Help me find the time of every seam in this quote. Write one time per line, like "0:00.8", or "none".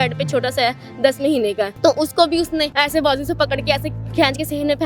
0:01.7
0:02.7